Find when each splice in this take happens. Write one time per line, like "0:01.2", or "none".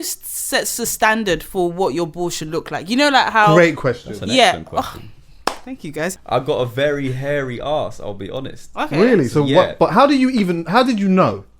0:06.1